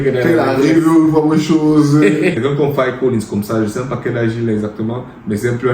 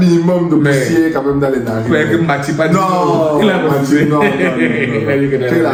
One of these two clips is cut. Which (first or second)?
first